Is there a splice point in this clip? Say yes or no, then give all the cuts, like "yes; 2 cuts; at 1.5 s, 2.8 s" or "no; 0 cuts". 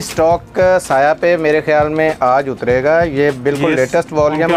no; 0 cuts